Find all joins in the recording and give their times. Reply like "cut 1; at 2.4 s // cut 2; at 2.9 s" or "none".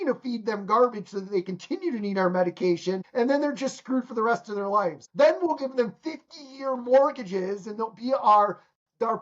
cut 1; at 3.1 s // cut 2; at 5.0 s